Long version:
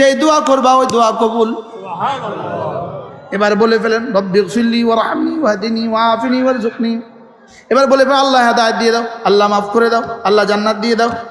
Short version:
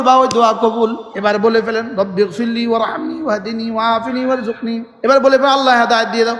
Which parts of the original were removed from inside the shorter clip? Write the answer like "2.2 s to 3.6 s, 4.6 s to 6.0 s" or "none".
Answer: 1.6 s to 3.2 s, 7.1 s to 7.6 s